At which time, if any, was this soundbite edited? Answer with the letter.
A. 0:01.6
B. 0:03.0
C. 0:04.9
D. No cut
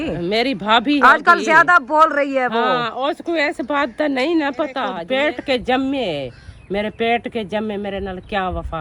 C